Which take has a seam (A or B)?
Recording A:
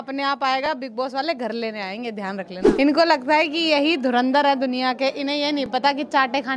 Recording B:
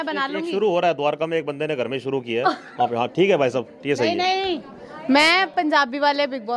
A